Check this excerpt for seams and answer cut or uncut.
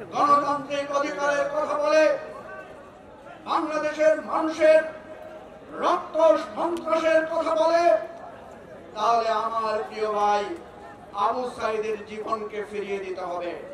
uncut